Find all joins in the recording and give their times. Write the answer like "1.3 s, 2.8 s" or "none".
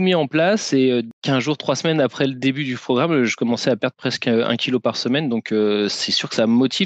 1.1 s